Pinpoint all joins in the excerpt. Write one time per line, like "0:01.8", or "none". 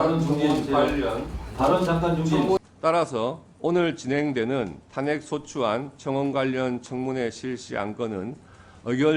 0:02.7